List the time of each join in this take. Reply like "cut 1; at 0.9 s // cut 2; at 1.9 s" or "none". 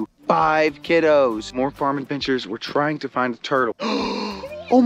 cut 1; at 1.5 s // cut 2; at 3.9 s